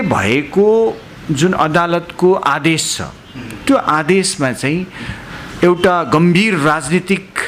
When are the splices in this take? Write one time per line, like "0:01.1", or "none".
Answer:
none